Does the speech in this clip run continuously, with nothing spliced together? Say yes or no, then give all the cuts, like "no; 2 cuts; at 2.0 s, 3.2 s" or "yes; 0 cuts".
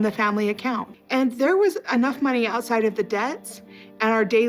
no; 1 cut; at 0.9 s